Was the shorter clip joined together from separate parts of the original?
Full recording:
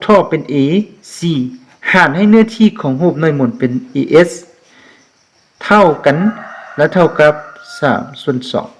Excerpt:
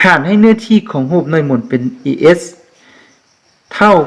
no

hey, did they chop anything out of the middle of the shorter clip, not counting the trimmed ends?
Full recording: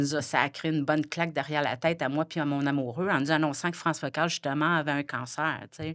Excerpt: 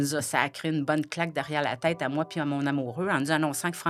no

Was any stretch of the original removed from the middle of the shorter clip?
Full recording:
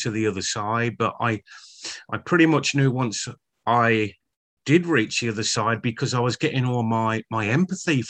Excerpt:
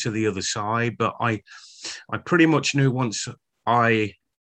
no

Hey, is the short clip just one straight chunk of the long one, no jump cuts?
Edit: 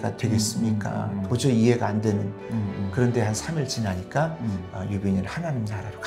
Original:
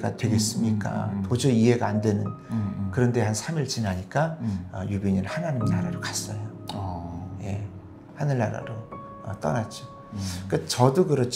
yes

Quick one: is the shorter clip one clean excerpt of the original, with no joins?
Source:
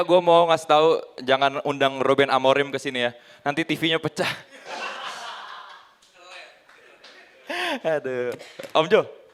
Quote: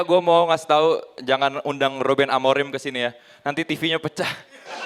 yes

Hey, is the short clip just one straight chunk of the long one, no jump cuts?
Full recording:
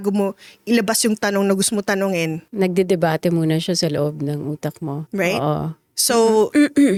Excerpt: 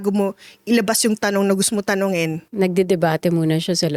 yes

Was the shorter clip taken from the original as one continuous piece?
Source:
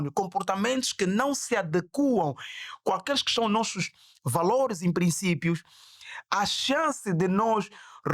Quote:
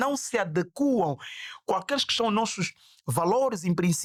yes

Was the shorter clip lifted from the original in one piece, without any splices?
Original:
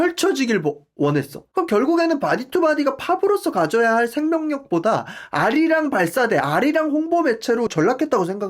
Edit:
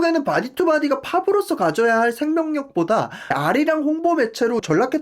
no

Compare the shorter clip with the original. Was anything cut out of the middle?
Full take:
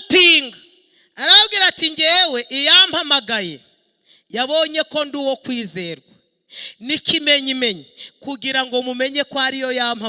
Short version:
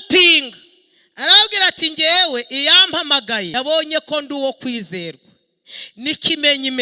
yes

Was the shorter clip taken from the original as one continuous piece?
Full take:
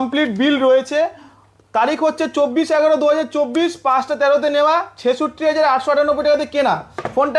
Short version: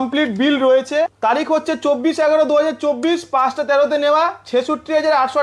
no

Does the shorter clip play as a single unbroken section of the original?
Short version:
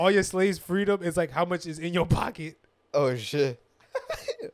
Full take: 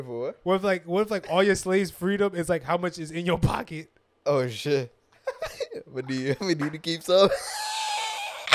yes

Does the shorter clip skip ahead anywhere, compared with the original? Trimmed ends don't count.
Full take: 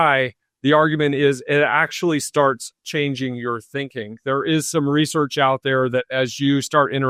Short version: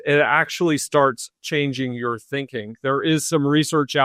no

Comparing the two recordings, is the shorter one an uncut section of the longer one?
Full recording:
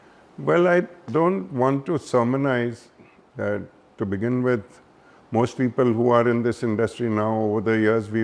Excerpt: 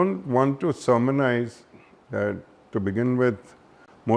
yes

